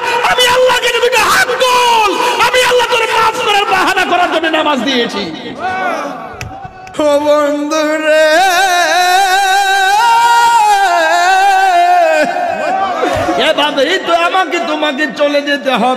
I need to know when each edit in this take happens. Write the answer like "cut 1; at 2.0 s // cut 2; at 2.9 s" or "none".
cut 1; at 6.8 s